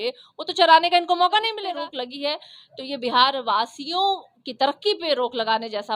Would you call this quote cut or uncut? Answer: cut